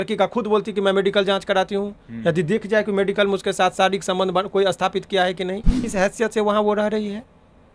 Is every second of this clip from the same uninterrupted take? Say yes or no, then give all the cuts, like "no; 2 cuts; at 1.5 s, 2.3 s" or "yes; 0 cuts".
no; 1 cut; at 5.8 s